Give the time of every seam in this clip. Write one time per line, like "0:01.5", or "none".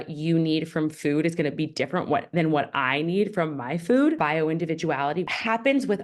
0:04.2